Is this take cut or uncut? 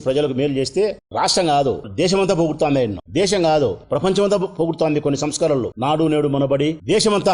uncut